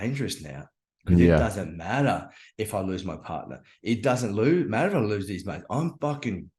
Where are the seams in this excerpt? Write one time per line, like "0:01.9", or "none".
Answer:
none